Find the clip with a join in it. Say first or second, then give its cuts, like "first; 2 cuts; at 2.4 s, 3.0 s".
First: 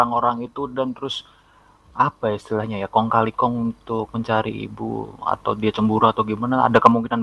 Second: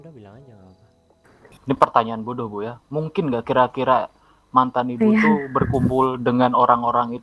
second; 1 cut; at 1.5 s